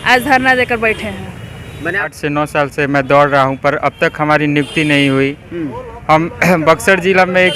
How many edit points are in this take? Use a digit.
1